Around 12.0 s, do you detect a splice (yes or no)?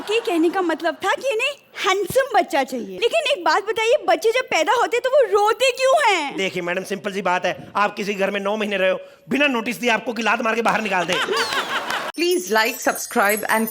yes